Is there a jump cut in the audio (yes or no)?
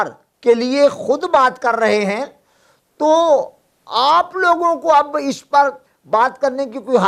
no